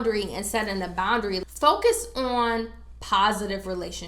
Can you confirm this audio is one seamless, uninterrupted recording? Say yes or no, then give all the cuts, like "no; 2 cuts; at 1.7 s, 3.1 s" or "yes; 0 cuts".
no; 1 cut; at 1.5 s